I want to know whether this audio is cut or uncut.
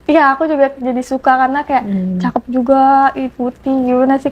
uncut